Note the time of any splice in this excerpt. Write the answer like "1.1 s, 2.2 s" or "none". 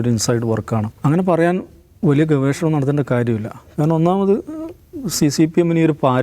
0.9 s